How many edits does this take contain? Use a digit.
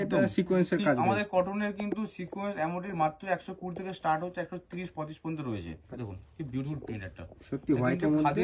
1